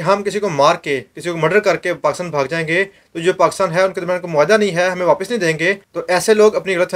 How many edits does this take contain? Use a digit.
1